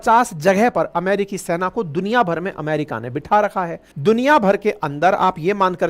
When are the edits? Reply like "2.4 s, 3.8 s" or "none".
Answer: 3.8 s